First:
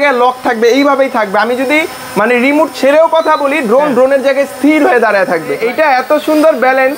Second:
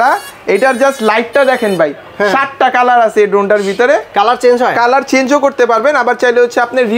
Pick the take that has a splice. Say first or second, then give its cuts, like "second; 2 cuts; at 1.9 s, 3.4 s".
first; 1 cut; at 5.6 s